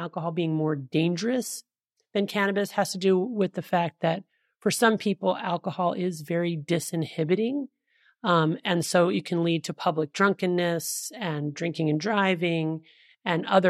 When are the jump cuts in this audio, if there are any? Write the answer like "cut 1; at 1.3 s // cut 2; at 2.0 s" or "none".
none

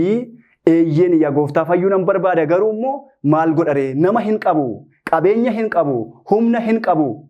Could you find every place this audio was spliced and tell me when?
none

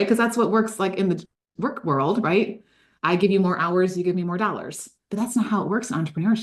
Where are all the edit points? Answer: none

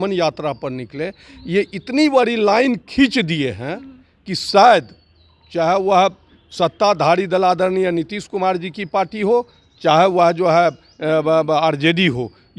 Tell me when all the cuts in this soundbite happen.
none

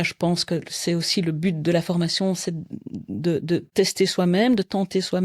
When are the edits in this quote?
cut 1; at 3.7 s

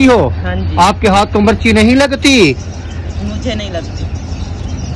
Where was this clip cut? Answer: none

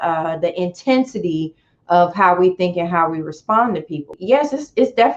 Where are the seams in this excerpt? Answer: cut 1; at 4.1 s

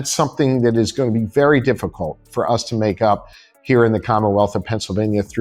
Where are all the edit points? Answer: none

